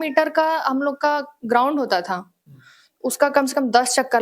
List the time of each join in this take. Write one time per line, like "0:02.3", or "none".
none